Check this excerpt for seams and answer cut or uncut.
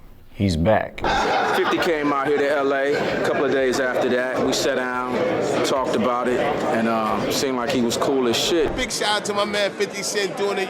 cut